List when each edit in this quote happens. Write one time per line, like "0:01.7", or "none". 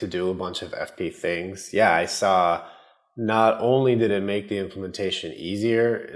none